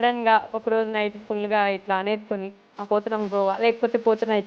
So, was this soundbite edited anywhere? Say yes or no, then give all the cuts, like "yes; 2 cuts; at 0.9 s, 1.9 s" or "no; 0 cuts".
no; 0 cuts